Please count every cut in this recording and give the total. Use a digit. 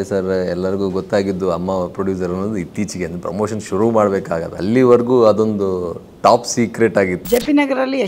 2